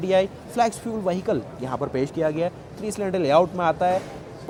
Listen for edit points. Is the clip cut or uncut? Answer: uncut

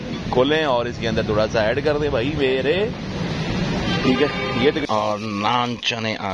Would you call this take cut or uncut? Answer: cut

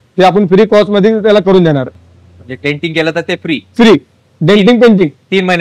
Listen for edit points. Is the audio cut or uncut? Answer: uncut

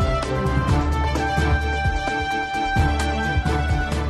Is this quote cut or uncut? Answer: uncut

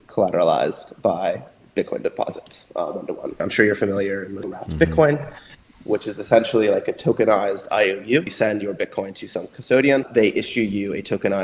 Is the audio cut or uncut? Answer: cut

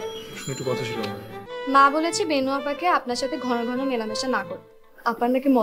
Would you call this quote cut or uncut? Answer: cut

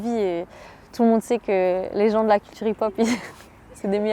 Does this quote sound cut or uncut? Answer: uncut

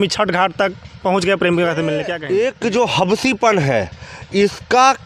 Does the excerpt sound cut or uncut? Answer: cut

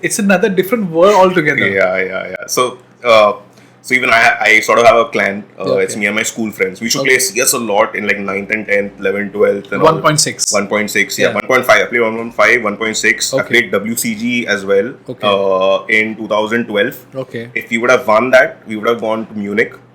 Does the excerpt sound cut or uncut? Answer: uncut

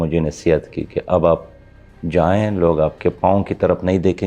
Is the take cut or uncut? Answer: uncut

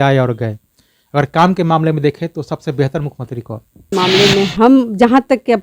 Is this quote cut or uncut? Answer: cut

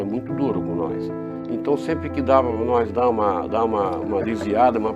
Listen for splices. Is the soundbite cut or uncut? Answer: uncut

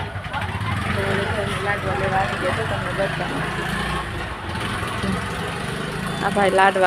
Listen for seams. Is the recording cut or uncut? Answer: uncut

